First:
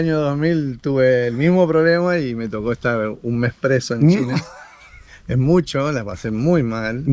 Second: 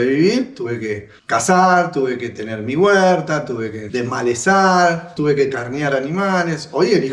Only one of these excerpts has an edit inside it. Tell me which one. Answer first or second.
second